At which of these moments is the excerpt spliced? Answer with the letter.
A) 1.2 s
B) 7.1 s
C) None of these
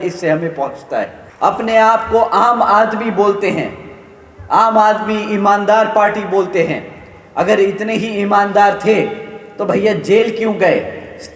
A